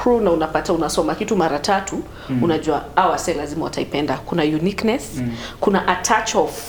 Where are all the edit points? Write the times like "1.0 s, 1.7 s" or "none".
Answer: none